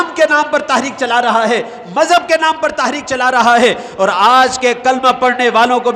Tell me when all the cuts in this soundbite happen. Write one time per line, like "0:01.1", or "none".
none